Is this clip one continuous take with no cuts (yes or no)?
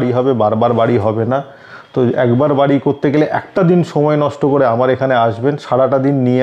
yes